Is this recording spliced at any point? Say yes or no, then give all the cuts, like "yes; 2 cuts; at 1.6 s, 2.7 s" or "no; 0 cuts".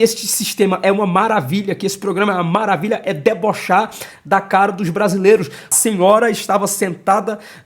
yes; 1 cut; at 5.8 s